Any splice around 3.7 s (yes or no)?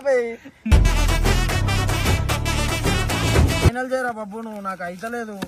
yes